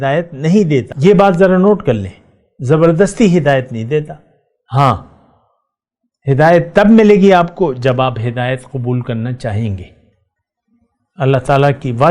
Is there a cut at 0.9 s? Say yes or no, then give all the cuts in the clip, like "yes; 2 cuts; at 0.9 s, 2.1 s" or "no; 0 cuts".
yes; 1 cut; at 0.9 s